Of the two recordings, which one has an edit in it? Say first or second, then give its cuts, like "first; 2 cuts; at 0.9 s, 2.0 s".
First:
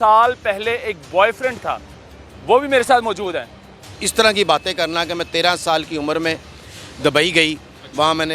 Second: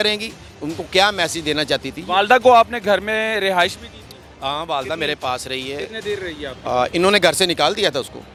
first; 1 cut; at 4.0 s